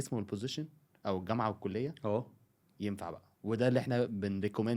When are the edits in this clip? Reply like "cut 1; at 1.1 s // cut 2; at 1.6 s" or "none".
none